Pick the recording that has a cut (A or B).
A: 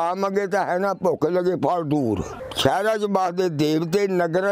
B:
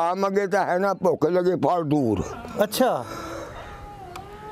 A